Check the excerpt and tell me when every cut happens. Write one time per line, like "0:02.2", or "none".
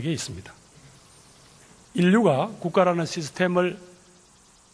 none